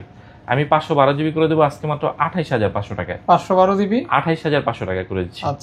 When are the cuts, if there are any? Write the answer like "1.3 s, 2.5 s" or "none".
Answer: none